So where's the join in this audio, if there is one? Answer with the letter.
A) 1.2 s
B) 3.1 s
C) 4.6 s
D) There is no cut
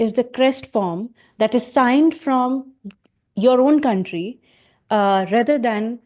D